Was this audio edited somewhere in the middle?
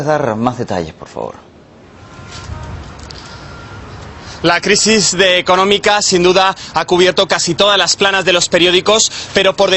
yes; 1 cut; at 7.7 s

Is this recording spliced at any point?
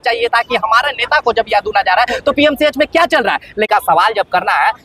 yes; 1 cut; at 3.7 s

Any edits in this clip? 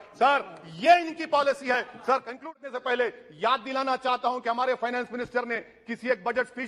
yes; 1 cut; at 2.4 s

